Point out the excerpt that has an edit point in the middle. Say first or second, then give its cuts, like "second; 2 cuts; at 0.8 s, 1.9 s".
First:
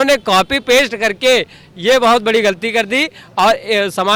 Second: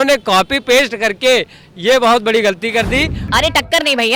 second; 1 cut; at 3.2 s